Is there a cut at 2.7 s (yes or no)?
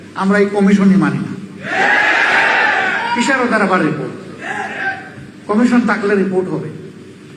yes